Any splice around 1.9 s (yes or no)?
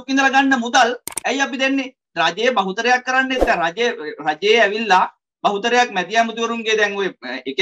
no